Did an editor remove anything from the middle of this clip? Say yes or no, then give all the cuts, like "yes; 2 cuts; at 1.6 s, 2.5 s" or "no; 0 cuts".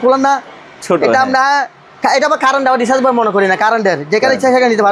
no; 0 cuts